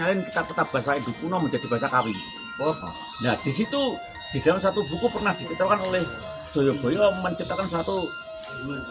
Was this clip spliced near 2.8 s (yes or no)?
yes